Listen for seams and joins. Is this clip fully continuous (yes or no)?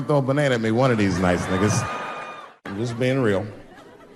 yes